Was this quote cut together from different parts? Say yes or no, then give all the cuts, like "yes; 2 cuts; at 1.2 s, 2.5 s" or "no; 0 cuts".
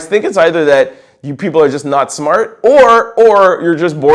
no; 0 cuts